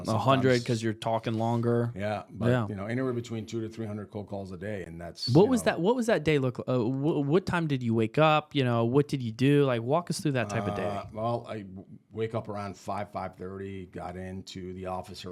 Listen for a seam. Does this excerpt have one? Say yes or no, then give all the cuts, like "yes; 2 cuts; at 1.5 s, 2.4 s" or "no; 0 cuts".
no; 0 cuts